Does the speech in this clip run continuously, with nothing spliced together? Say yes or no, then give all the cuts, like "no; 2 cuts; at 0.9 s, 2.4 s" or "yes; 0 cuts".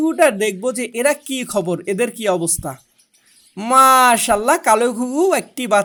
yes; 0 cuts